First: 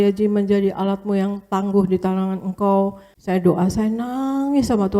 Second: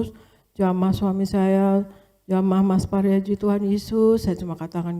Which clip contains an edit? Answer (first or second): first